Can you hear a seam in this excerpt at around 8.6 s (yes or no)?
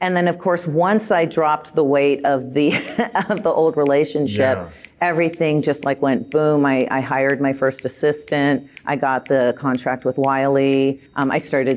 no